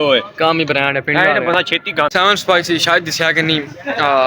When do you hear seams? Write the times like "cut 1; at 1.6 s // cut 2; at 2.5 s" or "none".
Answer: cut 1; at 2.1 s

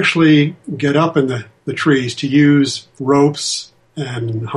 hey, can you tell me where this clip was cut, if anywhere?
cut 1; at 2.9 s

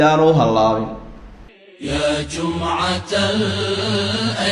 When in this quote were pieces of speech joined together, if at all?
cut 1; at 1.6 s

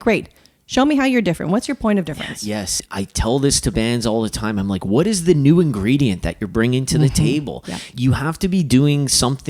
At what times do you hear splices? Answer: cut 1; at 2.8 s // cut 2; at 7.9 s

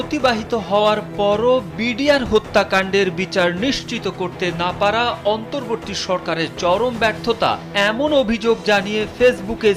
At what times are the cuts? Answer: none

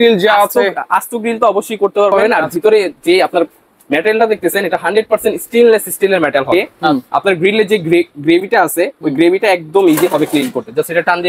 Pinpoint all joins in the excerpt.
cut 1; at 2.4 s // cut 2; at 6.8 s

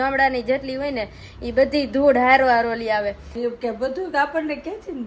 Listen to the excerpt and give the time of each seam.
cut 1; at 3.3 s

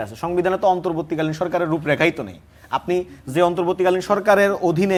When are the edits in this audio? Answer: none

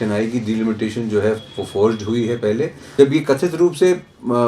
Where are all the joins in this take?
cut 1; at 2.8 s

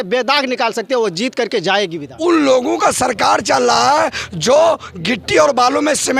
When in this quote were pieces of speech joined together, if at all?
cut 1; at 2.0 s

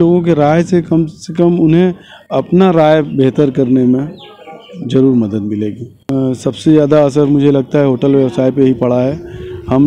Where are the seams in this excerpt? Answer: cut 1; at 6.0 s

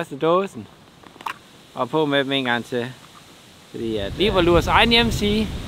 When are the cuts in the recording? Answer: cut 1; at 4.1 s

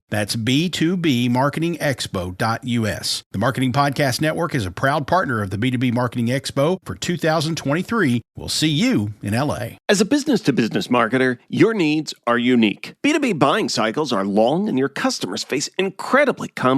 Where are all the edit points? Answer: cut 1; at 9.7 s

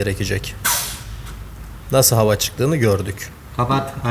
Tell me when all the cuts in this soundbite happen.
none

